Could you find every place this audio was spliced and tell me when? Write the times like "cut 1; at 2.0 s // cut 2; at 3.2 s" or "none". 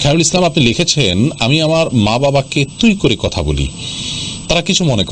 none